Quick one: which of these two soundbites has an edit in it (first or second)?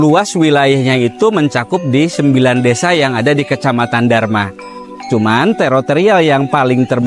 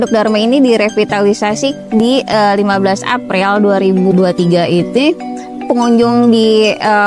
second